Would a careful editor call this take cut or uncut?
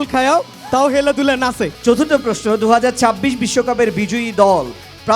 cut